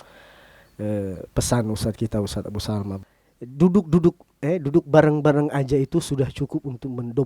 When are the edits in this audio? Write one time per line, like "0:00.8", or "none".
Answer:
0:03.0